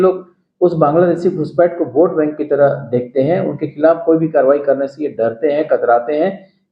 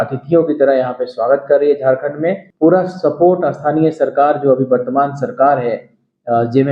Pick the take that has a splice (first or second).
second